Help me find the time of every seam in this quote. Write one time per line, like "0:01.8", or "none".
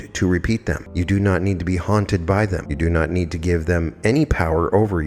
0:00.9
0:02.7